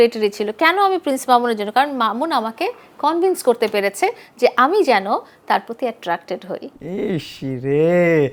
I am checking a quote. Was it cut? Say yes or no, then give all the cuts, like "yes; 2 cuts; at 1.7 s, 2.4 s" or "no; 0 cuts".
no; 0 cuts